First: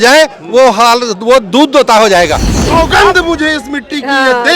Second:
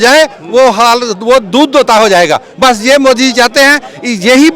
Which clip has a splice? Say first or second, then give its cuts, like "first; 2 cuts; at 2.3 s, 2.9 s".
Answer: first; 1 cut; at 2.4 s